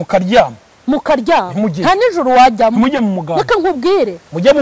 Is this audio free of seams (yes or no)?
yes